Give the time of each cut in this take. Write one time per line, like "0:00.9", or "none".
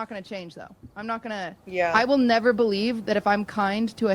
none